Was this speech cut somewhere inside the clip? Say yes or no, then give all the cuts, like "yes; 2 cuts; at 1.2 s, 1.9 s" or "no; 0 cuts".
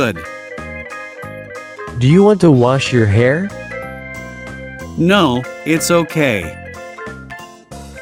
no; 0 cuts